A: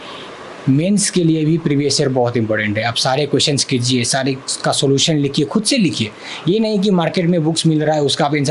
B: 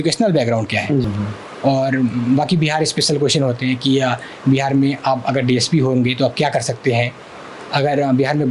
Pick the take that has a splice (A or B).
B